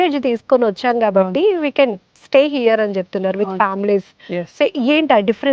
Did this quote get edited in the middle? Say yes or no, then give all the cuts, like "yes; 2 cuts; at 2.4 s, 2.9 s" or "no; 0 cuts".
no; 0 cuts